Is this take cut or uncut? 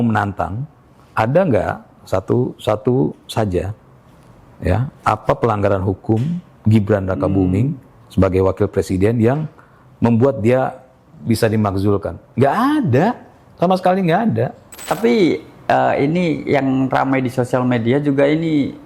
cut